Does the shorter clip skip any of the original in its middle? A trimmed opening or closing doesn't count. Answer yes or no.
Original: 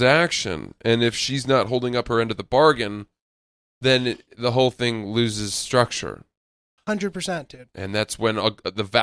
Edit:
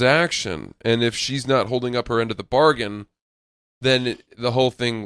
no